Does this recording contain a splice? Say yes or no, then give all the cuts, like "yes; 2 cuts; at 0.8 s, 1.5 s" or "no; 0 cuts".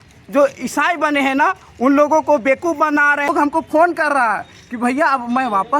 yes; 1 cut; at 3.3 s